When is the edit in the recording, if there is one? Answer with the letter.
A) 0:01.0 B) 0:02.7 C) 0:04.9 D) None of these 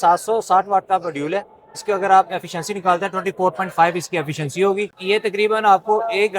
C